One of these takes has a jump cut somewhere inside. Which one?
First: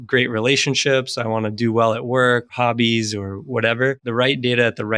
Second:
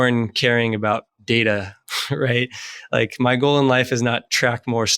first; 2 cuts; at 2.5 s, 4.0 s

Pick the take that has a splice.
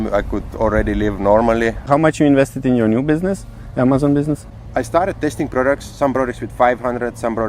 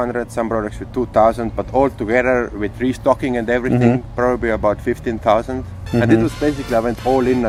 first; 2 cuts; at 1.8 s, 4.5 s

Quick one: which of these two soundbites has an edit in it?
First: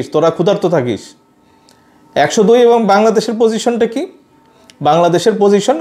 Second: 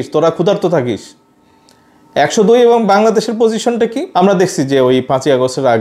second; 1 cut; at 4.0 s

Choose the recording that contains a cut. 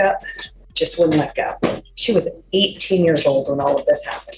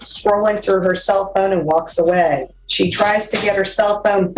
second; 1 cut; at 2.6 s

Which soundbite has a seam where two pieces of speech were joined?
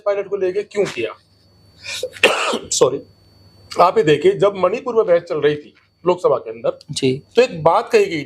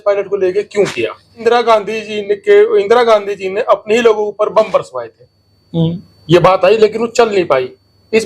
second; 1 cut; at 1.4 s

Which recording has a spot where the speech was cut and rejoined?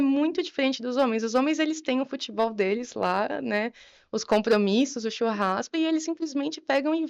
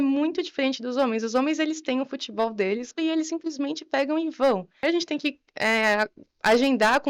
second; 2 cuts; at 2.9 s, 4.8 s

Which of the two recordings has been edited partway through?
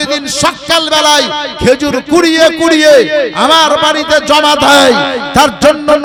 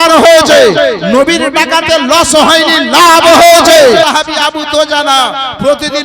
second; 1 cut; at 4.0 s

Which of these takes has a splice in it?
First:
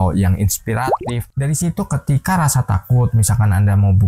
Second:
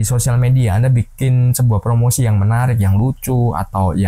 first; 1 cut; at 1.2 s

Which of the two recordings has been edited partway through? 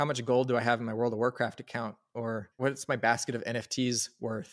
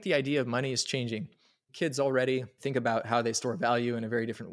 first; 1 cut; at 2.5 s

